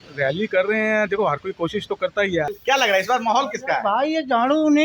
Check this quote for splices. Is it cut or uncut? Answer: cut